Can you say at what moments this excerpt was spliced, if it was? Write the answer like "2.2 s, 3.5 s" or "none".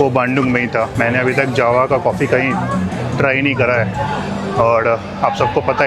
0.9 s